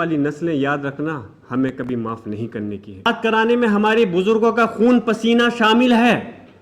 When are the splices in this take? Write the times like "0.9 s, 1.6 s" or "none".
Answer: 3.1 s